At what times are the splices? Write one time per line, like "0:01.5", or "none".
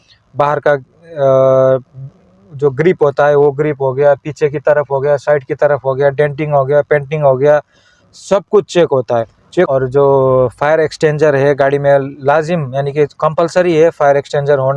0:09.7

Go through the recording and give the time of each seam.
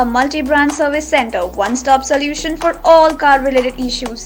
none

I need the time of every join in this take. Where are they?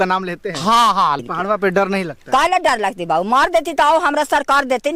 0:01.2

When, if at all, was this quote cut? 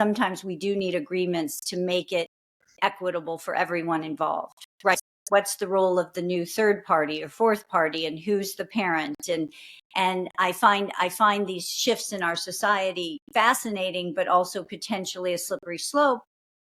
0:05.0

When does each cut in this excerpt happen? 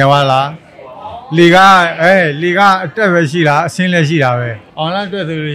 0:04.6

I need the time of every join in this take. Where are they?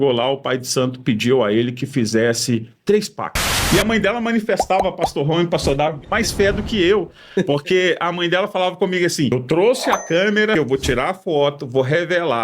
0:03.5
0:09.3
0:10.5

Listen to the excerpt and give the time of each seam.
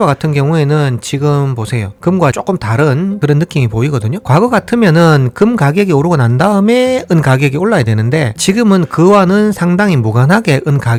none

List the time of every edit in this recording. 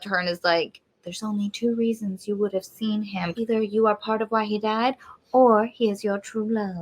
0:03.3

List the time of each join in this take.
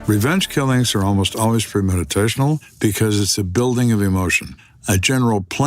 0:02.7
0:04.7

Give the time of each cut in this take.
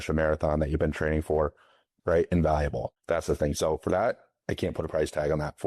0:01.8
0:02.8

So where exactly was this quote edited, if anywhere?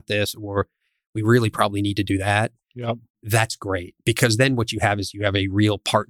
none

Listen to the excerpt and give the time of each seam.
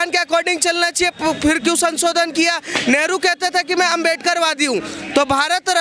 none

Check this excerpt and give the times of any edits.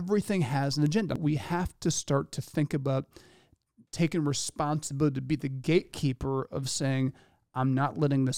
0:01.1

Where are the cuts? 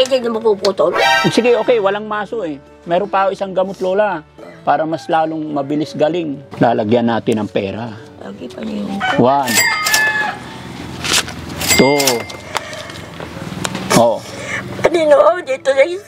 0:01.2
0:06.4

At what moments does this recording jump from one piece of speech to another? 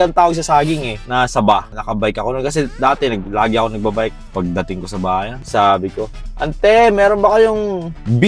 0:00.9
0:01.8
0:04.2
0:05.4

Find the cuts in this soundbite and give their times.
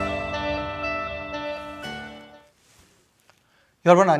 0:02.3

